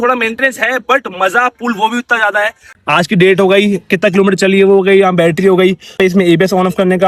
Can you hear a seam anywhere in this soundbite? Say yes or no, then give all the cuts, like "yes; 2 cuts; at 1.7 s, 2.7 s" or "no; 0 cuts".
yes; 2 cuts; at 2.7 s, 5.9 s